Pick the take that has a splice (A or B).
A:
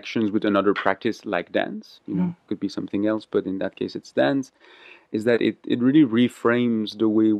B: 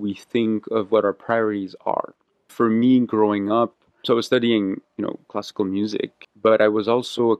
B